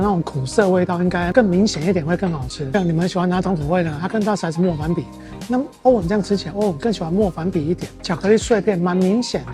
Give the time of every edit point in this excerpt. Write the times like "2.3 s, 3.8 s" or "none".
2.7 s